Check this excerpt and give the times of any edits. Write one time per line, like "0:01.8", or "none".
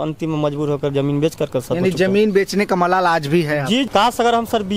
0:03.9